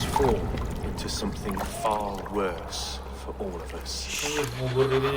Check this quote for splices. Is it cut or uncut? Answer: uncut